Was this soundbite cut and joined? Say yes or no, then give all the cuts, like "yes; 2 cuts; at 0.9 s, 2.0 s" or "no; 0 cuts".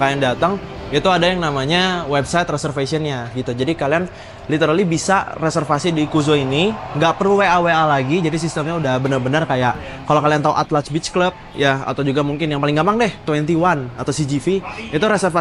no; 0 cuts